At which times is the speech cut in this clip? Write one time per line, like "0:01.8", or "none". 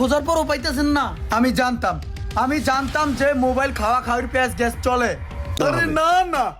0:05.5